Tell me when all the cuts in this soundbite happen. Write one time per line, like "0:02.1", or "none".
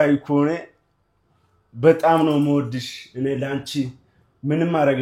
none